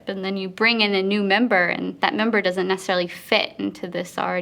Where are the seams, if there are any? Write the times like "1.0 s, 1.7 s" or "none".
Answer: 1.9 s